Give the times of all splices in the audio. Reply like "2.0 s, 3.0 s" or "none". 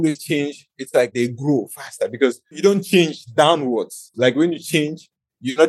none